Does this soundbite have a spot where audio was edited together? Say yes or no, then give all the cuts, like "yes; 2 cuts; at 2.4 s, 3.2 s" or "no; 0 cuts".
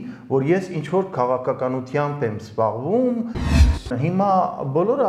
yes; 1 cut; at 3.6 s